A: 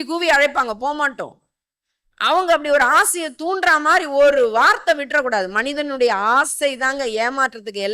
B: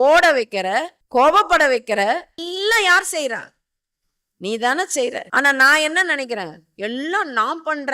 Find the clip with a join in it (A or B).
B